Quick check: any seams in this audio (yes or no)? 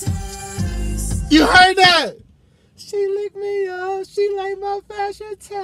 no